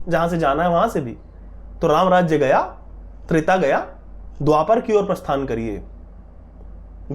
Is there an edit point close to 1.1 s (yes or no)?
no